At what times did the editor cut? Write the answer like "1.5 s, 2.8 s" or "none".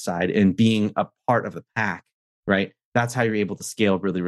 none